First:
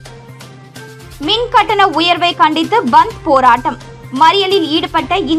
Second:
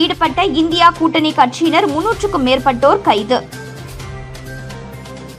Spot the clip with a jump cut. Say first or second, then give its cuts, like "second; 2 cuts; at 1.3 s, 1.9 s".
first; 1 cut; at 1.2 s